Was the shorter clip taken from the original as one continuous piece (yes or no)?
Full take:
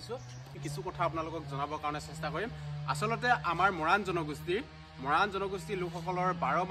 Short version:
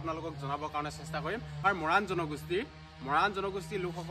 no